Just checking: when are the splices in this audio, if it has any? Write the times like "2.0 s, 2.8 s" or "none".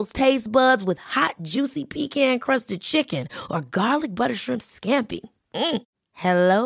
none